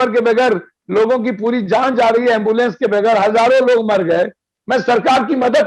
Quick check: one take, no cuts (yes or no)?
no